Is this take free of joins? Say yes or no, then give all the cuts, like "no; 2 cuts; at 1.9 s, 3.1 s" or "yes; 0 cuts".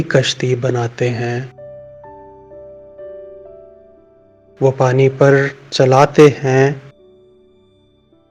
yes; 0 cuts